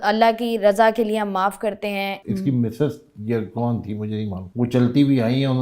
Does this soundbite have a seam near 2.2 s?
yes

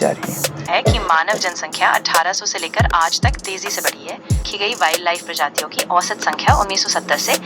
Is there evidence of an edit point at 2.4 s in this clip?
no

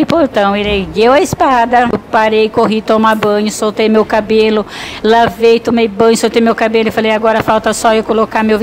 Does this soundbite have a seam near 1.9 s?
yes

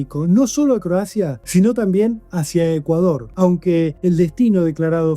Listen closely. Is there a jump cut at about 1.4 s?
yes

